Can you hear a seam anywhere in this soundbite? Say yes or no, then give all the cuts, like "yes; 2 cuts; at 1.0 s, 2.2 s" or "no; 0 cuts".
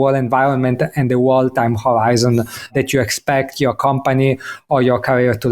yes; 1 cut; at 2.7 s